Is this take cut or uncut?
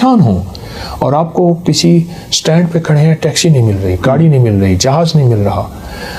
uncut